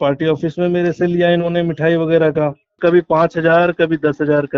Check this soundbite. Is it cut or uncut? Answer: cut